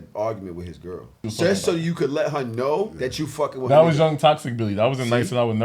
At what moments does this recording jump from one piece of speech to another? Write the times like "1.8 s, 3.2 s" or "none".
1.2 s, 2.9 s